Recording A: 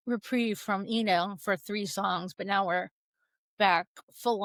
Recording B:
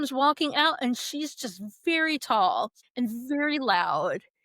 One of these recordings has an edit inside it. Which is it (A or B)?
B